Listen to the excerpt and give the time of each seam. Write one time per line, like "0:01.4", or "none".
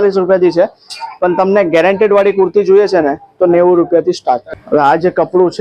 0:04.5